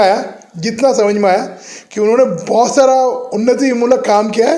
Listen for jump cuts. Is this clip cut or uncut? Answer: uncut